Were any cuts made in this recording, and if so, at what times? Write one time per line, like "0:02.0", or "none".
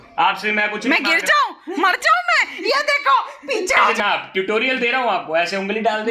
0:03.8